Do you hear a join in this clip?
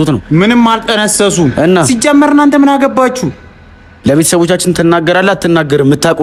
no; 0 cuts

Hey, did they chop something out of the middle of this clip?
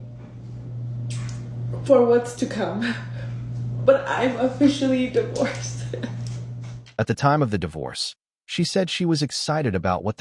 no; 0 cuts

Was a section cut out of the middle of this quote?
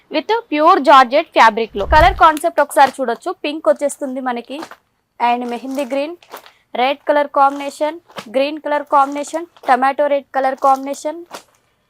yes; 1 cut; at 1.7 s

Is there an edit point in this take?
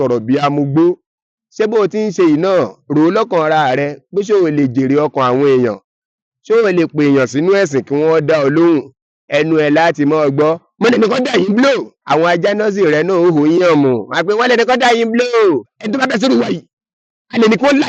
no; 0 cuts

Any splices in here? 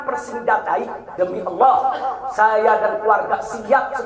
yes; 1 cut; at 1.0 s

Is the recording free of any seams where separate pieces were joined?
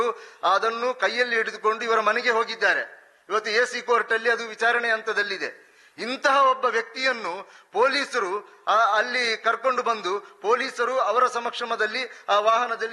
yes; 0 cuts

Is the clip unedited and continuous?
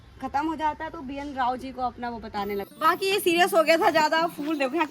no; 1 cut; at 2.7 s

